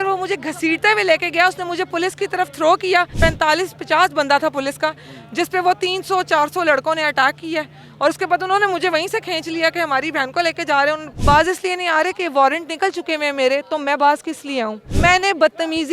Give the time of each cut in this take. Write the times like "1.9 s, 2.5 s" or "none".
3.1 s, 11.1 s, 14.9 s